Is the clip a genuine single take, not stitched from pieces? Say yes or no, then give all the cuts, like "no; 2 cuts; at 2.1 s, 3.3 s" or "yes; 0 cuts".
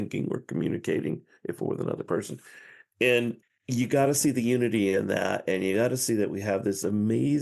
yes; 0 cuts